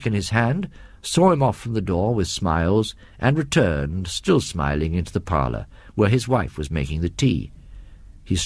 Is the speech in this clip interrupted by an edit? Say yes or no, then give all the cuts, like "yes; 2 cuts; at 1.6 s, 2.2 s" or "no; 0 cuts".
no; 0 cuts